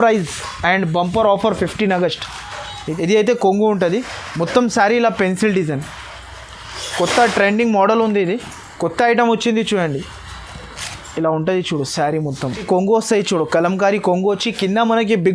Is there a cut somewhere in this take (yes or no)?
yes